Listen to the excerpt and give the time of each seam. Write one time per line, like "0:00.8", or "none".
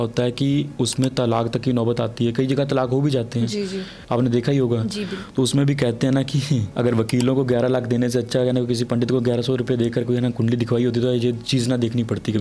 0:03.9
0:06.7